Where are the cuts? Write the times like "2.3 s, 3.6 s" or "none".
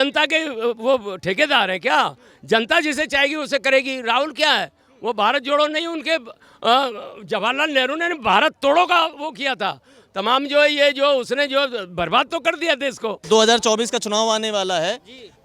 13.2 s